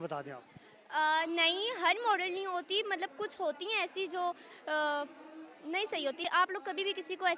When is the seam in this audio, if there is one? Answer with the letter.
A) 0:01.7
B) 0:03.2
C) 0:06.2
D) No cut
C